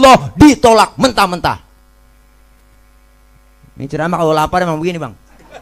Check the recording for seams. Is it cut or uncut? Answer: uncut